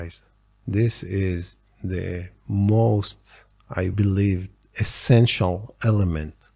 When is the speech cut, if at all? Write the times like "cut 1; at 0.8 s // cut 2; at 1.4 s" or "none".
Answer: cut 1; at 3.9 s